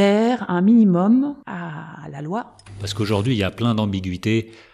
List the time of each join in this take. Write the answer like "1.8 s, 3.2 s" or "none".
1.4 s, 2.8 s